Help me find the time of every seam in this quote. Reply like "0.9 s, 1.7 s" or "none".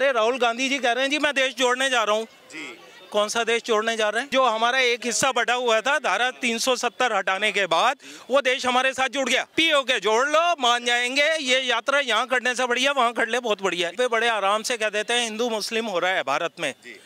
4.3 s, 9.5 s, 13.9 s